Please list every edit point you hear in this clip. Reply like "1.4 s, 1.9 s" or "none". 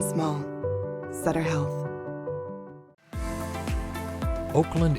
2.8 s